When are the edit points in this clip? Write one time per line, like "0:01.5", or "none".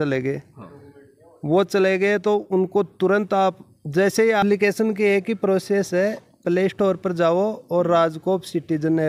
0:04.4

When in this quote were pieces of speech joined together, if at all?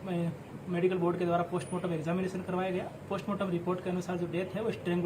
0:03.5

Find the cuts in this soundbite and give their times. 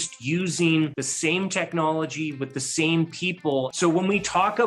0:01.0
0:03.7

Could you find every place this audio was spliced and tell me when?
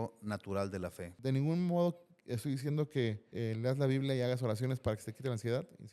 0:01.1
0:03.2

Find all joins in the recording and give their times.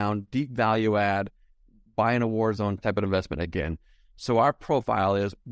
0:02.8

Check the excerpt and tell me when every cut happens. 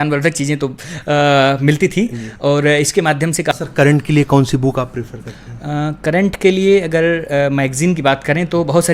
0:03.6

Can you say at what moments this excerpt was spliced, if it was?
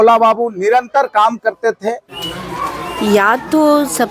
none

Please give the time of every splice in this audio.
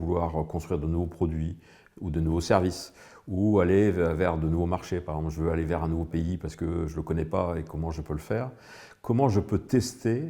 0:06.1

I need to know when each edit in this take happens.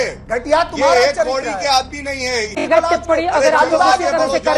0:02.6

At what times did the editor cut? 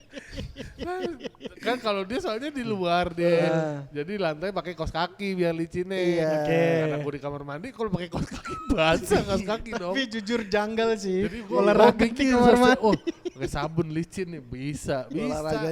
none

